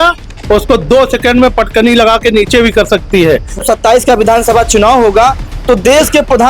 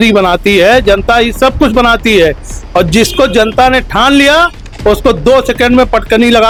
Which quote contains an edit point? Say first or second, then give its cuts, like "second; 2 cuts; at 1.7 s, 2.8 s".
first; 1 cut; at 3.6 s